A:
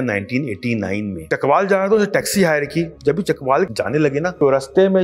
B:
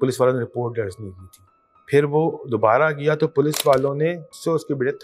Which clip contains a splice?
A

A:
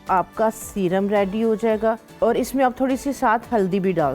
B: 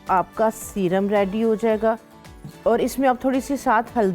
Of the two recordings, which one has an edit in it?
A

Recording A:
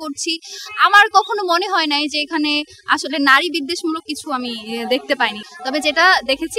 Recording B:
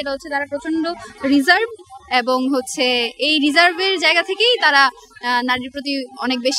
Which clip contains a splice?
A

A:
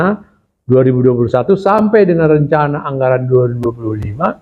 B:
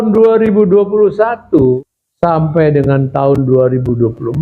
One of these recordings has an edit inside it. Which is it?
B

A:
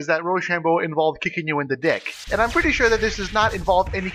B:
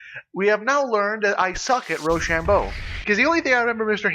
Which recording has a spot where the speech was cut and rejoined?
B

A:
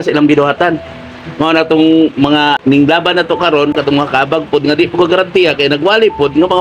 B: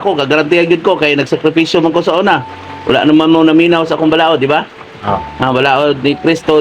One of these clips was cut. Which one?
A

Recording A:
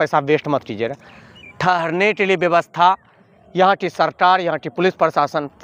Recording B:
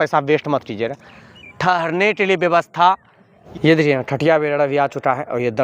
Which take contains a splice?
B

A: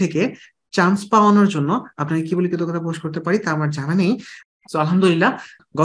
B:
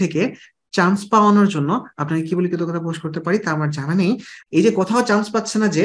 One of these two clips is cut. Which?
B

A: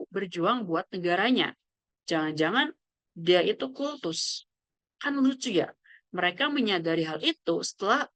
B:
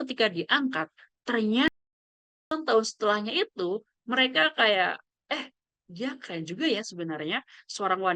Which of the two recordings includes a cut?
B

